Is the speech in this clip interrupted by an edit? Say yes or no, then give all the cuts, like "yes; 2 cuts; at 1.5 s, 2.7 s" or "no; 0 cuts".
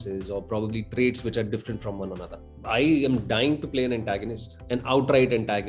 yes; 1 cut; at 2.6 s